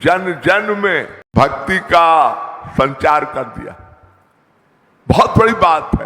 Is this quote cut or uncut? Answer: cut